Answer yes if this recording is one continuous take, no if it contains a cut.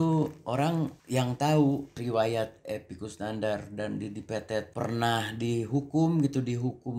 yes